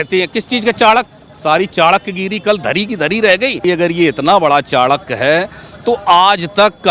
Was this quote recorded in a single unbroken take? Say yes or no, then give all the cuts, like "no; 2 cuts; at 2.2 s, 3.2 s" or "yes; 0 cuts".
no; 1 cut; at 3.6 s